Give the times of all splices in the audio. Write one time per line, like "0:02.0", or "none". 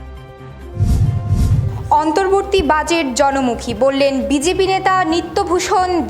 none